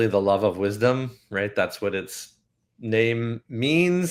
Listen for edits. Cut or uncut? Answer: uncut